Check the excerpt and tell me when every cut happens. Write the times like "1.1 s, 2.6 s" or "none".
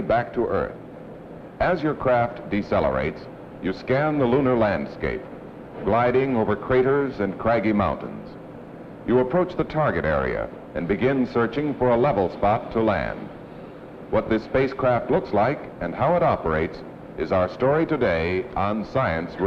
5.9 s